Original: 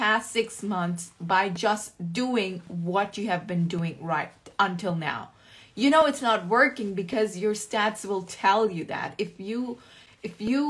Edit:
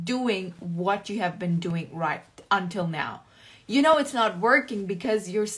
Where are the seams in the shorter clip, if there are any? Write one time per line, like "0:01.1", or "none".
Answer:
none